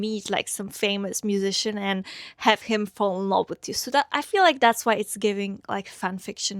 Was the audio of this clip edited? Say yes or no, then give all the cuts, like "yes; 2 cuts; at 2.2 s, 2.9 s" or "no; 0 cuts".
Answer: no; 0 cuts